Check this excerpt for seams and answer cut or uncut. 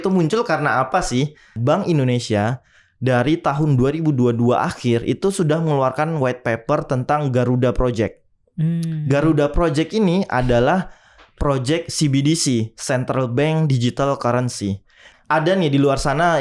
cut